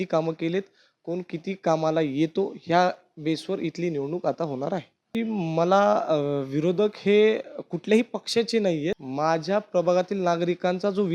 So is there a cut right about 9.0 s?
yes; 2 cuts; at 5.0 s, 9.0 s

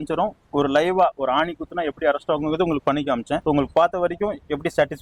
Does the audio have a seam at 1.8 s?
no; 1 cut; at 3.4 s

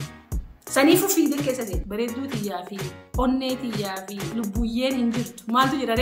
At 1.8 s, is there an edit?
yes; 1 cut; at 1.8 s

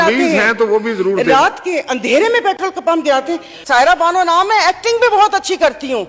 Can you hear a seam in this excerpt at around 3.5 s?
yes; 1 cut; at 3.5 s

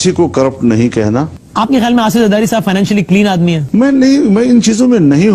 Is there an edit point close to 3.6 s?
yes; 2 cuts; at 1.4 s, 3.6 s

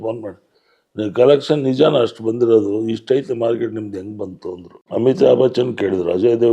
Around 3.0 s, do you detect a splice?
no; 1 cut; at 4.7 s

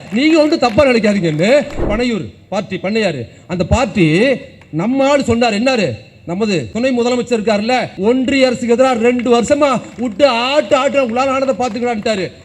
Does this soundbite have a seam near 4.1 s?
no; 3 cuts; at 1.8 s, 6.7 s, 7.9 s

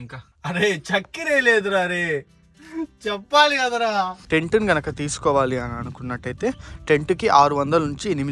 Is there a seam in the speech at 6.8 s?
no; 1 cut; at 4.2 s

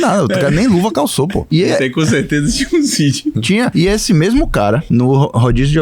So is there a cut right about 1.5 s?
yes; 3 cuts; at 1.5 s, 3.5 s, 4.8 s

